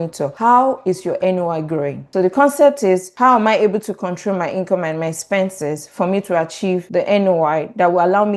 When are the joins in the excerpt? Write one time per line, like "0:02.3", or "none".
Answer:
0:02.0